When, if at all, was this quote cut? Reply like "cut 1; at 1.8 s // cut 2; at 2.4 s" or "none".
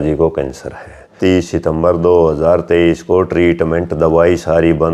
cut 1; at 1.1 s